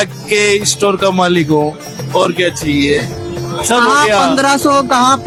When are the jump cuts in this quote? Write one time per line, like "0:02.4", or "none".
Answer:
none

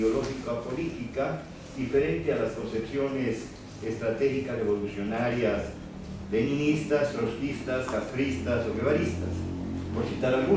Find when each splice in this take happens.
none

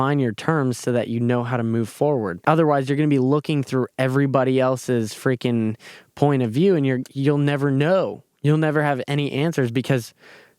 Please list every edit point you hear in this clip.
0:02.4

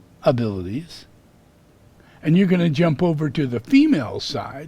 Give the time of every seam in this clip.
0:02.0

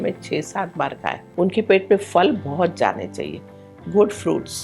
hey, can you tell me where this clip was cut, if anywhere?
0:01.2

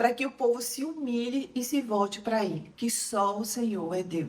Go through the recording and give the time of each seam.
0:02.7

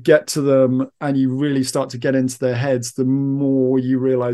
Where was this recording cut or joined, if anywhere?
none

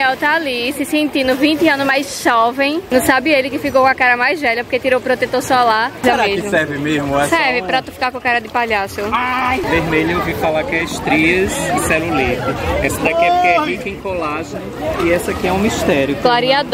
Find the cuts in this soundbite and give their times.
0:02.8
0:06.0
0:09.6

